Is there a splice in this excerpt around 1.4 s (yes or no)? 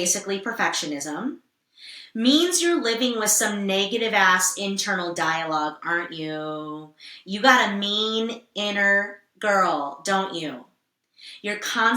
no